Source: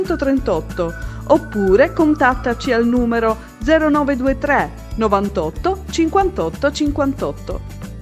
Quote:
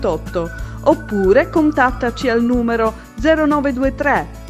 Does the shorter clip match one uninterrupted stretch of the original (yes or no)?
yes